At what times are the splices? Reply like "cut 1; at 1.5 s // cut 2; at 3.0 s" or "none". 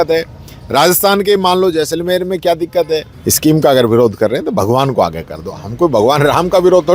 cut 1; at 3.1 s